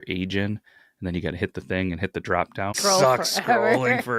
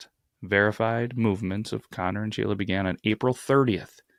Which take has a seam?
first; 1 cut; at 2.8 s

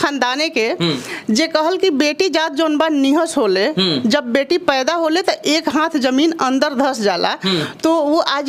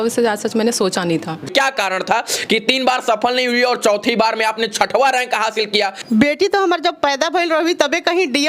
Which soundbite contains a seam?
second; 2 cuts; at 1.5 s, 6.0 s

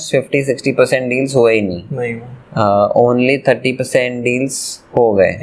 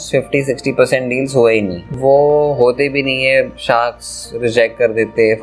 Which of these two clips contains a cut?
second; 1 cut; at 2.0 s

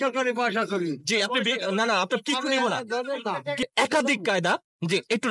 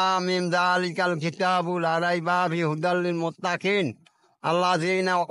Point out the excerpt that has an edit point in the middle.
first; 1 cut; at 3.7 s

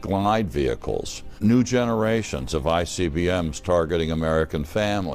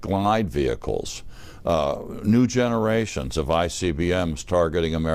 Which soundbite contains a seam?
first; 1 cut; at 1.3 s

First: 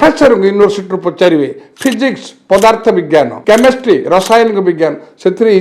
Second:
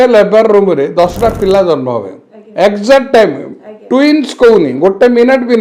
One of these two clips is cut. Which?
first; 1 cut; at 3.4 s

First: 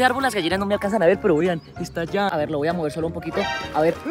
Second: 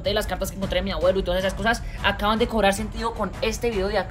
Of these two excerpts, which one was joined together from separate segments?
first; 1 cut; at 2.3 s

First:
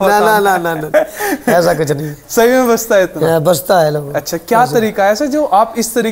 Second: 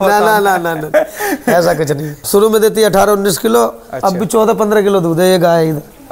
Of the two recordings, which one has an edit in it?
second; 1 cut; at 2.1 s

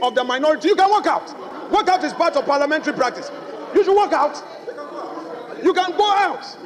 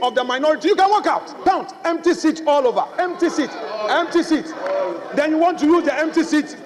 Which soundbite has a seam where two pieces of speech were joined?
second; 1 cut; at 1.3 s

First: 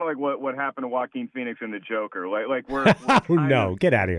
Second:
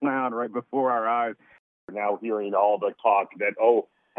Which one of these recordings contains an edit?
second; 1 cut; at 1.8 s

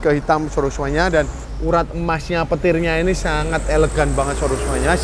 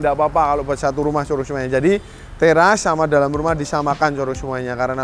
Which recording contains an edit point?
first; 1 cut; at 1.4 s

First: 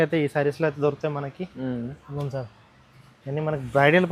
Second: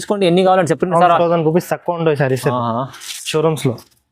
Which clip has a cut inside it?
second; 1 cut; at 1.2 s

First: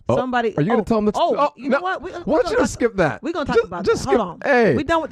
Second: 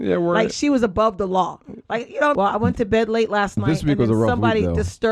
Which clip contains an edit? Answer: second; 1 cut; at 2.3 s

